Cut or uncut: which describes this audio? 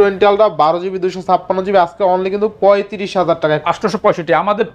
cut